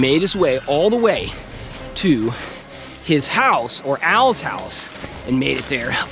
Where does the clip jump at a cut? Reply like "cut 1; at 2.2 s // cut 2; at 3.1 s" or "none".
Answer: none